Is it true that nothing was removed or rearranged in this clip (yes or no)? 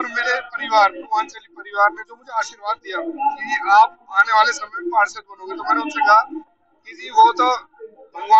yes